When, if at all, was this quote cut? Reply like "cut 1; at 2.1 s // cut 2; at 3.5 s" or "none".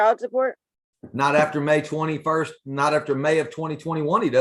none